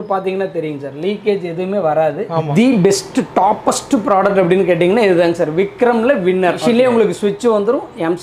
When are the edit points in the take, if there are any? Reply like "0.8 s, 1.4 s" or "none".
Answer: 2.5 s, 6.6 s